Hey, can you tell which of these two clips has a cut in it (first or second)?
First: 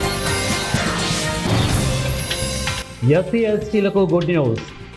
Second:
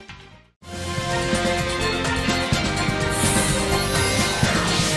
first